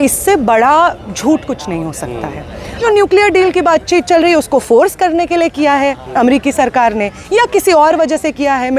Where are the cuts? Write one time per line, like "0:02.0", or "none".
0:02.8